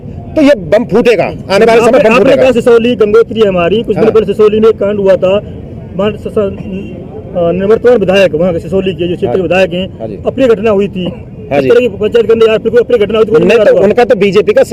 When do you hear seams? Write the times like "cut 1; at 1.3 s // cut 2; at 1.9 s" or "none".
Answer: none